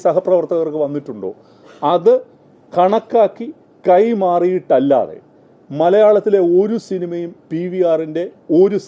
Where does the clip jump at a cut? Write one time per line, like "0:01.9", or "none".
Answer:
none